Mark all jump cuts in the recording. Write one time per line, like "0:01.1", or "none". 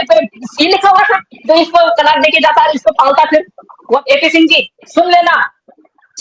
0:04.0